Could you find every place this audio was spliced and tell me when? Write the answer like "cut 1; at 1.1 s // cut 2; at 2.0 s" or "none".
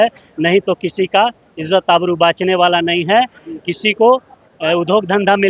none